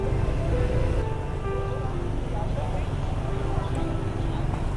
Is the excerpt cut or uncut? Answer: cut